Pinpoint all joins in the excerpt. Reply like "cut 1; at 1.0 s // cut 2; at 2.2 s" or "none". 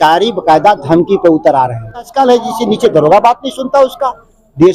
cut 1; at 2.1 s